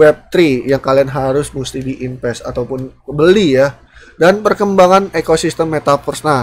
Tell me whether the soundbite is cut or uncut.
uncut